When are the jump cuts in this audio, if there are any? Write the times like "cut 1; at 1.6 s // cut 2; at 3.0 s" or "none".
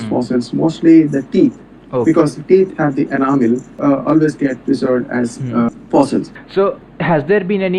cut 1; at 3.7 s // cut 2; at 5.7 s // cut 3; at 6.4 s